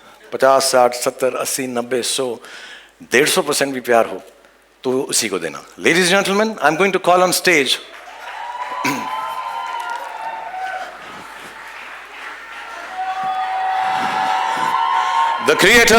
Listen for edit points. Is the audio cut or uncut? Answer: uncut